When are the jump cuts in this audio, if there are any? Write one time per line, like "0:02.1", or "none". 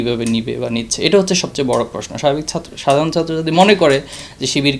none